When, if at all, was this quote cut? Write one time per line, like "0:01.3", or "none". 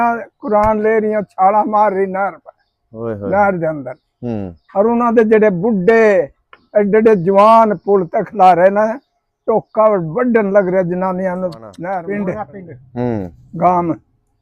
0:11.8